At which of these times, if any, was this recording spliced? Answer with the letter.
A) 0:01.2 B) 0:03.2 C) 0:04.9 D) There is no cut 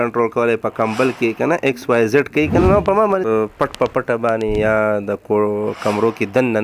B